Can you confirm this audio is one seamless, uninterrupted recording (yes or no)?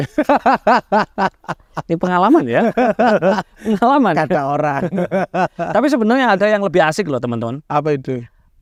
yes